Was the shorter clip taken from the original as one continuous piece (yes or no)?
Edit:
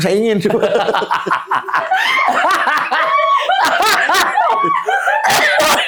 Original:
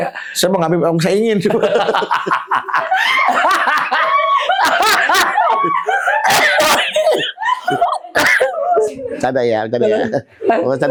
yes